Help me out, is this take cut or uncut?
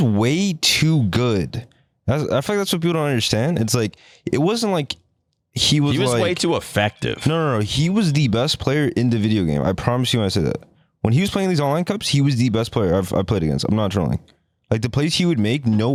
uncut